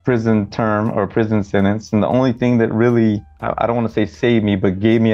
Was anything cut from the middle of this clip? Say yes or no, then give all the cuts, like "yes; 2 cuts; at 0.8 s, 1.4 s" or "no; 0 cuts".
yes; 1 cut; at 3.3 s